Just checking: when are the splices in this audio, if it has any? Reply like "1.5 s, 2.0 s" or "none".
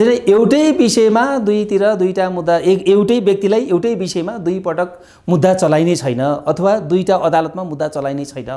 none